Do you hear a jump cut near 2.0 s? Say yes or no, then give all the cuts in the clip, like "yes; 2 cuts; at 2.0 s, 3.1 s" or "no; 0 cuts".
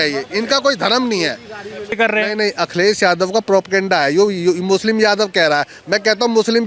yes; 1 cut; at 2.0 s